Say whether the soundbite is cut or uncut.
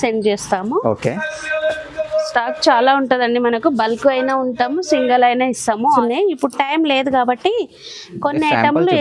cut